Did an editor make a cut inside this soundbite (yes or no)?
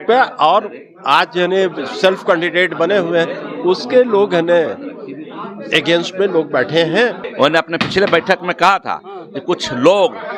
yes